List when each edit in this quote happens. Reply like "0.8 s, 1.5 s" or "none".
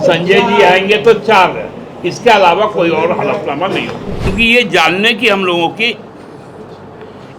4.3 s